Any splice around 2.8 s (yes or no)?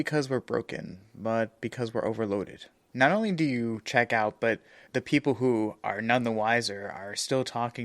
yes